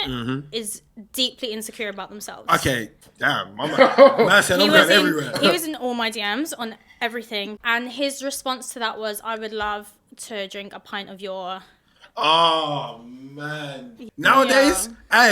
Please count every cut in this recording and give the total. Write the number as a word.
three